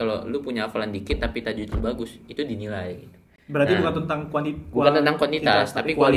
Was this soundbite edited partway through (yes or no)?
no